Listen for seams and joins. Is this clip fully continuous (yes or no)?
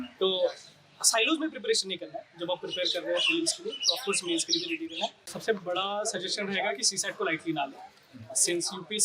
no